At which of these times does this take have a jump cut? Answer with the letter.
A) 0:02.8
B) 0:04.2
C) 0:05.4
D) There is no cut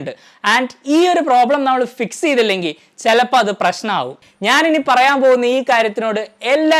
B